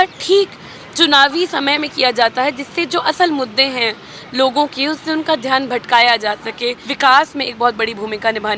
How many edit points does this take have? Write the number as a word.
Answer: one